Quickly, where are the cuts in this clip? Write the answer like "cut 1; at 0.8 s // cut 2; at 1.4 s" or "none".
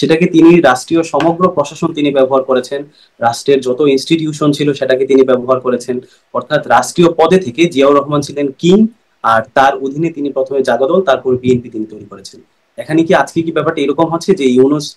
none